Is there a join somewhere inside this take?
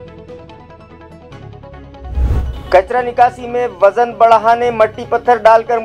no; 0 cuts

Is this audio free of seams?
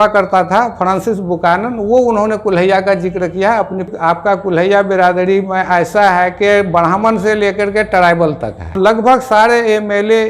no; 2 cuts; at 3.9 s, 8.8 s

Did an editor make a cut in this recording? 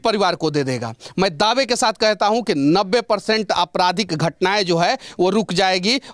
no; 0 cuts

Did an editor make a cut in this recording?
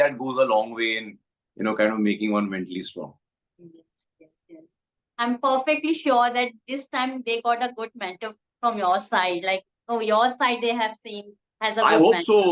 no; 0 cuts

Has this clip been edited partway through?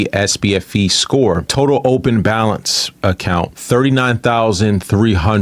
no; 0 cuts

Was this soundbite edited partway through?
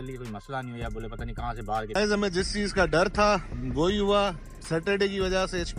yes; 1 cut; at 2.0 s

